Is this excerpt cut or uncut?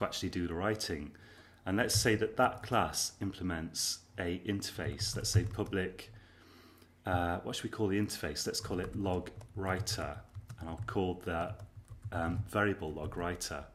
uncut